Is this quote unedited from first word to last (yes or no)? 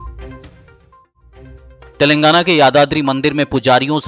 no